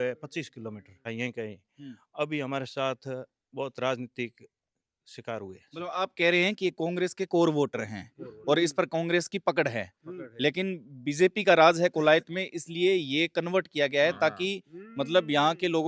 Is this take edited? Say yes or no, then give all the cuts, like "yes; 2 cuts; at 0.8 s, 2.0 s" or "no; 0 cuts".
yes; 1 cut; at 1.1 s